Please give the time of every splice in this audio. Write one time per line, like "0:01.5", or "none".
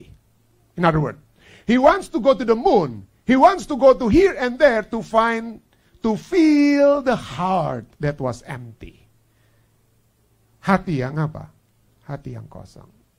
none

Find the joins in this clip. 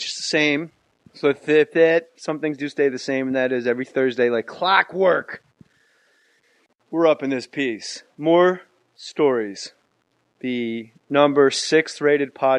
0:10.8

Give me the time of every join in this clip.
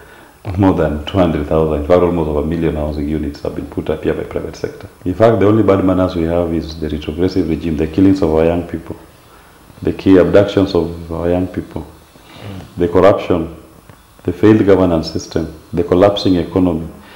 0:04.9

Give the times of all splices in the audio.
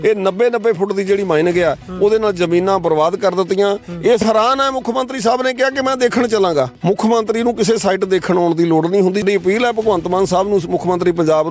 0:04.2
0:06.7
0:09.2

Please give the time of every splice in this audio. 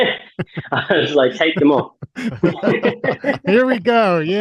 0:03.5

